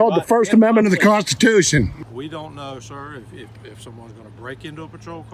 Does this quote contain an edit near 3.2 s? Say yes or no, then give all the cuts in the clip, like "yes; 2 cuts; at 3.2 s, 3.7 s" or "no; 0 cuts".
no; 1 cut; at 2.0 s